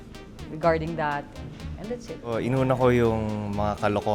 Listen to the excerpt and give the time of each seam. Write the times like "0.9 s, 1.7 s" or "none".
2.4 s